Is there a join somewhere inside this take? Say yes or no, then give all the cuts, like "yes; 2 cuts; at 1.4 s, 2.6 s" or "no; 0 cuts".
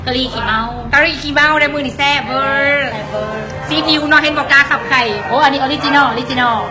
yes; 1 cut; at 2.4 s